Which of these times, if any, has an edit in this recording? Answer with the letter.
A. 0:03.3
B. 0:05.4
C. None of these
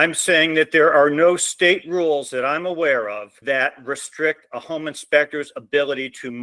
A